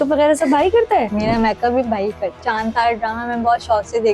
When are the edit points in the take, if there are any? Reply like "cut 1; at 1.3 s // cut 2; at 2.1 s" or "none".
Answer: cut 1; at 1.1 s // cut 2; at 2.4 s